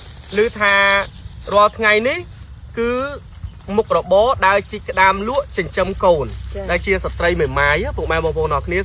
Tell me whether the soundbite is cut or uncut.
uncut